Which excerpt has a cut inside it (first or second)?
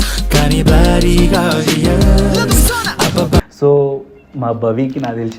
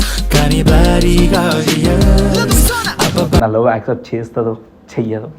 second